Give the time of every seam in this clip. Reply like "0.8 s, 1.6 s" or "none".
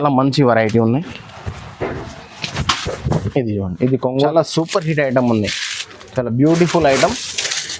4.1 s